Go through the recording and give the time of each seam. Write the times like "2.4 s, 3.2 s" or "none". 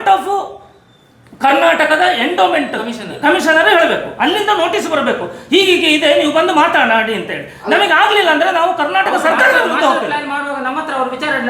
none